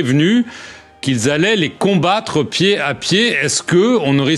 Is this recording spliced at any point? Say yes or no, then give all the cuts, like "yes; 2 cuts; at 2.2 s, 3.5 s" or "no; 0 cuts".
no; 0 cuts